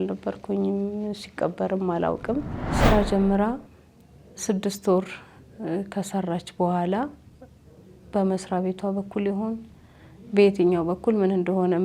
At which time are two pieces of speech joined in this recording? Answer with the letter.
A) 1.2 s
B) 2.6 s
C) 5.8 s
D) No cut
B